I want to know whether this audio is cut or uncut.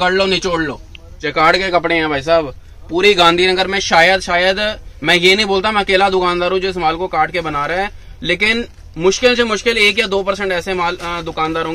cut